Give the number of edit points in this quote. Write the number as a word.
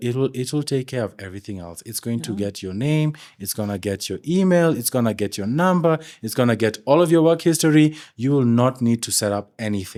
zero